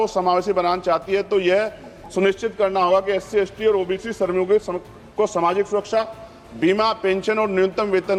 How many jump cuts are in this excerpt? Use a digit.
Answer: 0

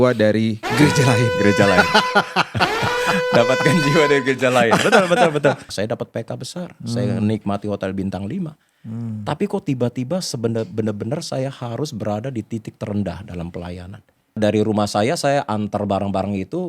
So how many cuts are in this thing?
2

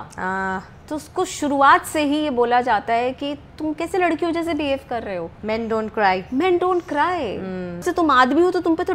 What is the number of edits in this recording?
2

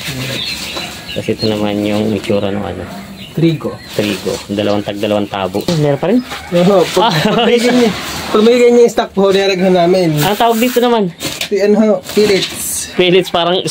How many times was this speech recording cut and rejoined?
1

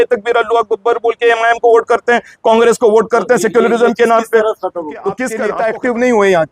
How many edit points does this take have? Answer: 1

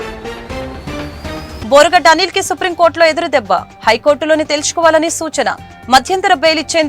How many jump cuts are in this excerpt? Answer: 1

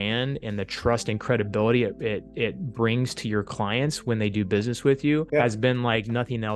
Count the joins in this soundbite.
1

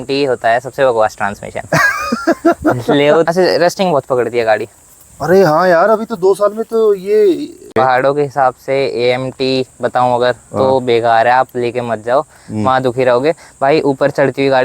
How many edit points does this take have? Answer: 2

